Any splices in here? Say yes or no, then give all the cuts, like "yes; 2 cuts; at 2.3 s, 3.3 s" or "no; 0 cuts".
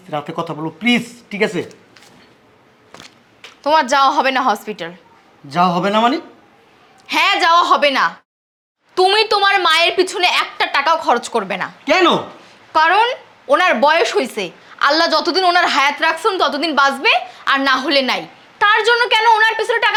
no; 0 cuts